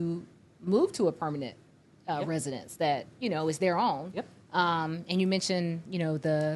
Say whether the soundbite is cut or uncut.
uncut